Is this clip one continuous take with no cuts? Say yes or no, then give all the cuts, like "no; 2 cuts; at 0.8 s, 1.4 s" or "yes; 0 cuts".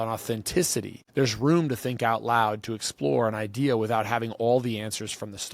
no; 1 cut; at 1.0 s